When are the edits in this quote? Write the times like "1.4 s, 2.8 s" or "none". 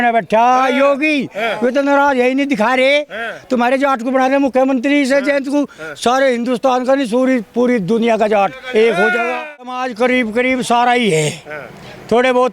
9.8 s